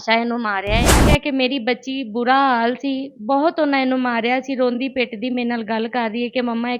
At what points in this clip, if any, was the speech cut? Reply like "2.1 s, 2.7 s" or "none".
1.0 s